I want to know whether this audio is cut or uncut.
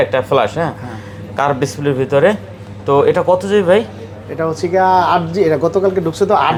uncut